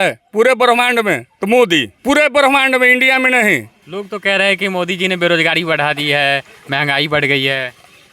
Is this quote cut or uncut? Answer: cut